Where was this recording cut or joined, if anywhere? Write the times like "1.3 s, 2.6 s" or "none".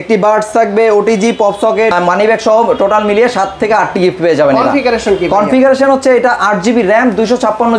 1.9 s